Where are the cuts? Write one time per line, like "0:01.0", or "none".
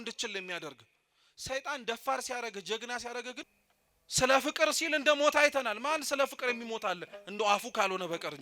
0:03.4

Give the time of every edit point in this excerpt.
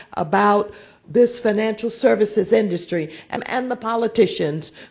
0:03.4

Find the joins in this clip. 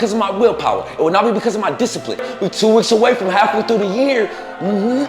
0:02.2

